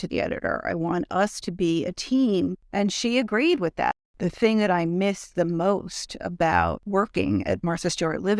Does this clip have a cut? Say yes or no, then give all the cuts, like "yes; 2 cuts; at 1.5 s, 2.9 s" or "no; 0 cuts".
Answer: yes; 3 cuts; at 2.6 s, 4.0 s, 6.8 s